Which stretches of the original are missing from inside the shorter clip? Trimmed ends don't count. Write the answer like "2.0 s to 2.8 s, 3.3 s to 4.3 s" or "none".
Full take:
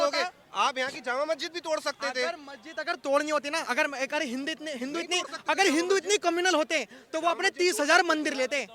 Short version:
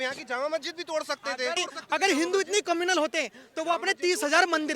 2.3 s to 5.1 s